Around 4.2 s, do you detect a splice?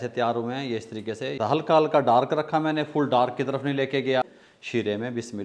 yes; 2 cuts; at 1.4 s, 4.2 s

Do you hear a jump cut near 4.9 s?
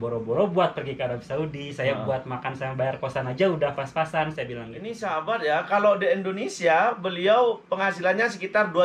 yes; 1 cut; at 4.9 s

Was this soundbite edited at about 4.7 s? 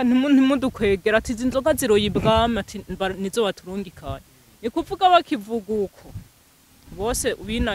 no; 0 cuts

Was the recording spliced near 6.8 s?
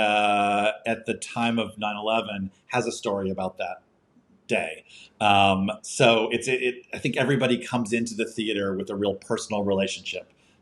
no; 0 cuts

